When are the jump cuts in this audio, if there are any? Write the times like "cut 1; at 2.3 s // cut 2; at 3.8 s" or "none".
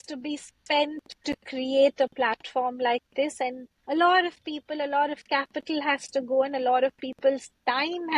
cut 1; at 1.1 s // cut 2; at 3.7 s